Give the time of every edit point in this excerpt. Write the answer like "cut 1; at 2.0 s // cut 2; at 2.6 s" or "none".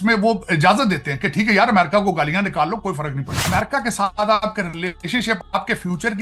cut 1; at 3.3 s // cut 2; at 5.4 s